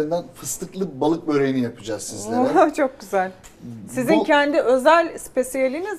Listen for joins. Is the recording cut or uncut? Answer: uncut